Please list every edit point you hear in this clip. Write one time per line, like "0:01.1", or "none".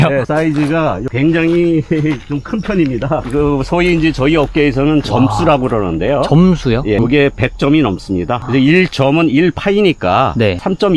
none